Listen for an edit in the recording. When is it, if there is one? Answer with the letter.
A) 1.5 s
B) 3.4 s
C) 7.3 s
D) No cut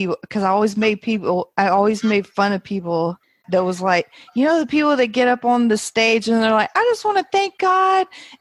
B